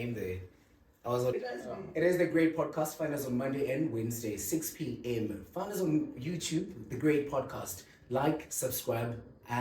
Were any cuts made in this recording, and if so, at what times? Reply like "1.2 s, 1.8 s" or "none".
1.4 s

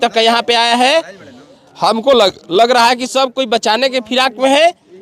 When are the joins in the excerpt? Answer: none

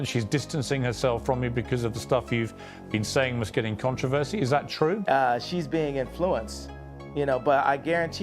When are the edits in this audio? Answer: 5.0 s

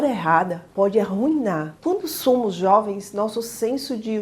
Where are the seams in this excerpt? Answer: 1.7 s

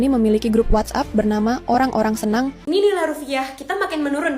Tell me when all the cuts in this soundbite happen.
2.6 s

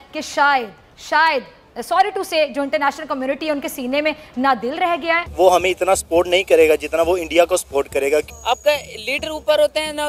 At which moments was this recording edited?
5.3 s, 8.3 s

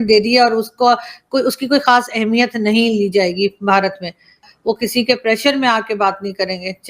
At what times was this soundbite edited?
4.4 s

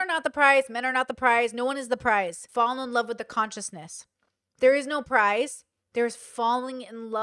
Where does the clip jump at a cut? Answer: 2.4 s

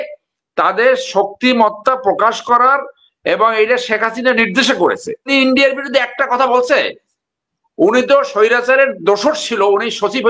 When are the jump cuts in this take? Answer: 5.3 s

